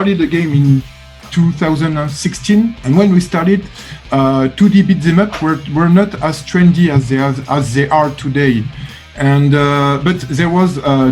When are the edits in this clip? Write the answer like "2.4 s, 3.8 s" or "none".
2.8 s